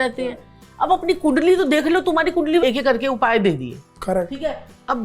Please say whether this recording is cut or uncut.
cut